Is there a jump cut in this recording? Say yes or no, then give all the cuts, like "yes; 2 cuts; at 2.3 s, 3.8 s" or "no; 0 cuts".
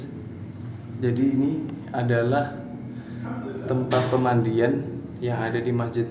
no; 0 cuts